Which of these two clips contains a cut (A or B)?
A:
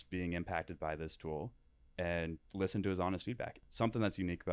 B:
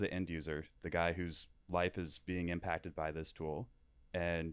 A